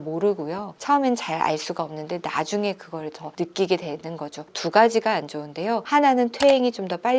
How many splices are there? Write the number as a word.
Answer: two